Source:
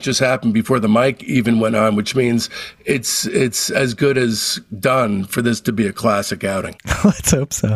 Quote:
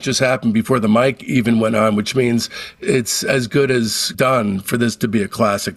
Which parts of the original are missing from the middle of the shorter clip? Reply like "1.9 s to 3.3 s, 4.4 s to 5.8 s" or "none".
2.7 s to 3.2 s, 4.5 s to 4.7 s